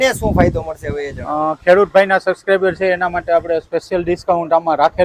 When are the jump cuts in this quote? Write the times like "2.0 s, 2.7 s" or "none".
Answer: none